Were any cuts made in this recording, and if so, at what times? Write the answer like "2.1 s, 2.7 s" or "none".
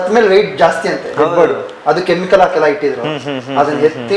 none